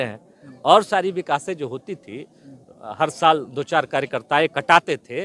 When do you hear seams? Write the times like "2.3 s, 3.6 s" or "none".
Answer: none